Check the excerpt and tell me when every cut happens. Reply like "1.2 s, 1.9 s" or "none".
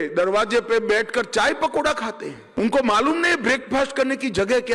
2.3 s